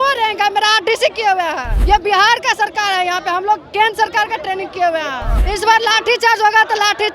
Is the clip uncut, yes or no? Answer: no